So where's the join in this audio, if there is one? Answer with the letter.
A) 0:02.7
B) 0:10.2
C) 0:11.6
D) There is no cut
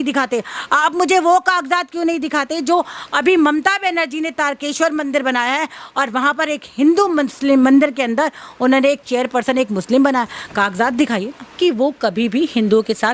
C